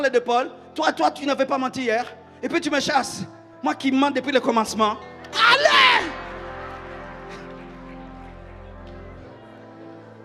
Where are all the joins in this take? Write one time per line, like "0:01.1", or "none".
none